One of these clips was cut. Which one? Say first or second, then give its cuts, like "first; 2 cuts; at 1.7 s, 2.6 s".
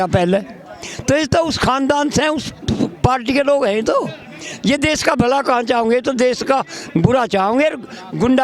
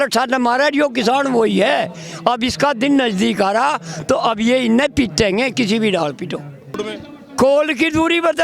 second; 1 cut; at 6.9 s